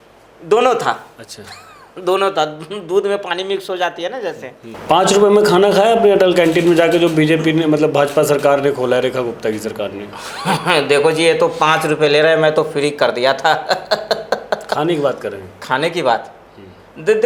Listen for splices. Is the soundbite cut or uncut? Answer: uncut